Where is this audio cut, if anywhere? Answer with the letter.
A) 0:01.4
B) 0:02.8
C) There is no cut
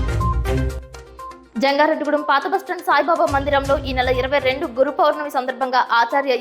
A